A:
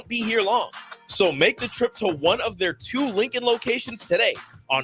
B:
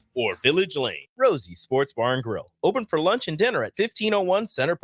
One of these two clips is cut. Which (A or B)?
B